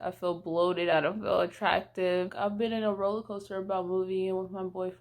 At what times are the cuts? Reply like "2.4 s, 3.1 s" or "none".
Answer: 0.9 s, 2.3 s